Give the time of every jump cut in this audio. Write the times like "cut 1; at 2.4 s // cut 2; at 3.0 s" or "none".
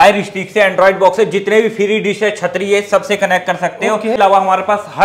cut 1; at 4.2 s